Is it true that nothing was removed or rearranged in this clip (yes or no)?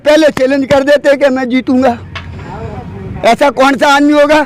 yes